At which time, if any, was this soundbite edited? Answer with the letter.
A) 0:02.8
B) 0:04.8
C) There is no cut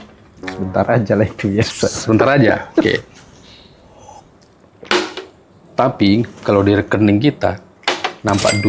B